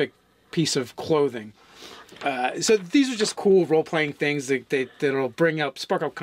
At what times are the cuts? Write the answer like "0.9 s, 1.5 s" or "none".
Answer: 4.3 s